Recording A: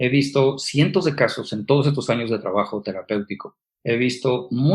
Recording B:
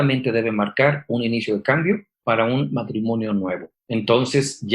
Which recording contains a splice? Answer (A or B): B